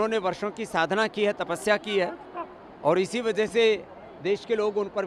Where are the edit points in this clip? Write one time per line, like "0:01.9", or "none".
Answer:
none